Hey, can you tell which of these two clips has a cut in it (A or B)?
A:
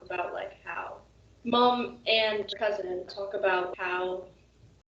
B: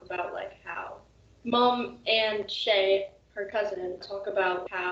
A